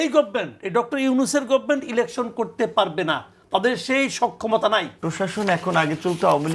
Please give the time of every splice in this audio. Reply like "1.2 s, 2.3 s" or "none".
5.0 s

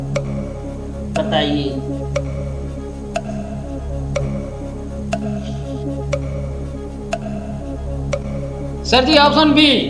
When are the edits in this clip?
8.9 s

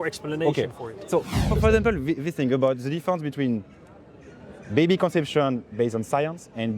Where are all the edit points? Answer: 1.5 s

